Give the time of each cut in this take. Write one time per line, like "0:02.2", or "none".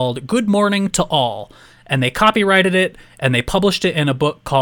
none